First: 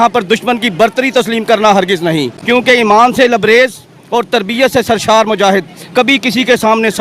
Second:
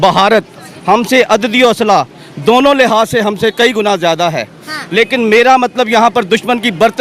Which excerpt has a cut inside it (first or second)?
first